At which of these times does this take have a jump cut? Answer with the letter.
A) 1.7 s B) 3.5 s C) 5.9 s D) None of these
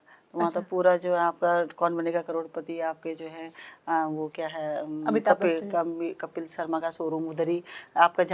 D